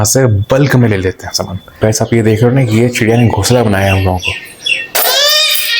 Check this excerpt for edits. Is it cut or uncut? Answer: cut